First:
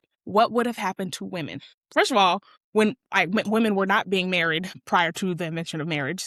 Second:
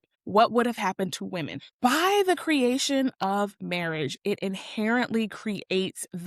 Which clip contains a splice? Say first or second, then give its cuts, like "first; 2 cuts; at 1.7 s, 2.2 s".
second; 1 cut; at 1.7 s